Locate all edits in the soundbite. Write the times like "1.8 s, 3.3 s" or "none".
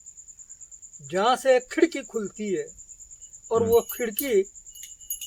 none